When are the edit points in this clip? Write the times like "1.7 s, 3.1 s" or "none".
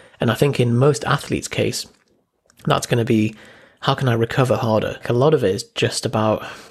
5.0 s